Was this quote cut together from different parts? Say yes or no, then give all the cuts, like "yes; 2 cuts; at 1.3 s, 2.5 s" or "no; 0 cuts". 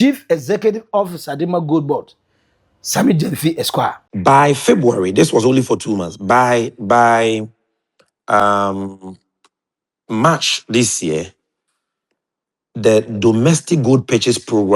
yes; 1 cut; at 4.1 s